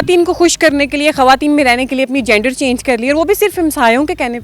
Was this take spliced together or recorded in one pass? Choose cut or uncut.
uncut